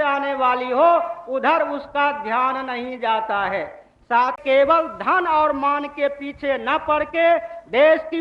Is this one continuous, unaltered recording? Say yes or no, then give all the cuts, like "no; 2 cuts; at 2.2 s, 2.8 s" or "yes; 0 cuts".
no; 1 cut; at 4.4 s